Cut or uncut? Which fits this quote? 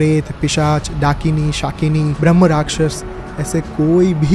uncut